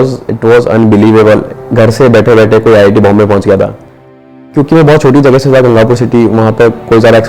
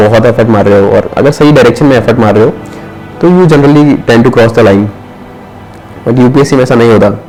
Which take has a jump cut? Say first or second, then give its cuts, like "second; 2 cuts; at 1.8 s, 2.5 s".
first; 2 cuts; at 1.5 s, 4.5 s